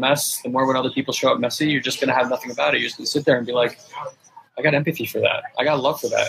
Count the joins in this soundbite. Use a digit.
0